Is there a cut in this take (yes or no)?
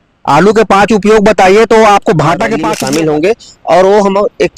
yes